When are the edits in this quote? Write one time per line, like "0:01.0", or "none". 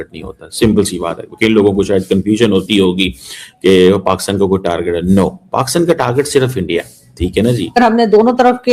0:07.8